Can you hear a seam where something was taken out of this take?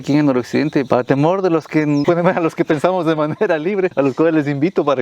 yes; 3 cuts; at 0.9 s, 2.0 s, 3.9 s

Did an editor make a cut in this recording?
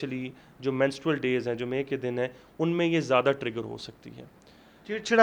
no; 0 cuts

